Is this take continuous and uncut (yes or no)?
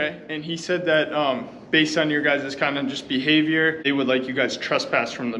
no